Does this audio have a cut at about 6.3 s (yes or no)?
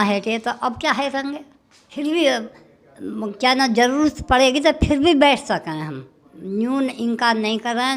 no